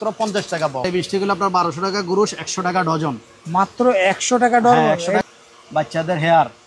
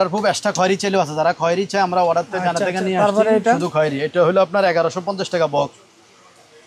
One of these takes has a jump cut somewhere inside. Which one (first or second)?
first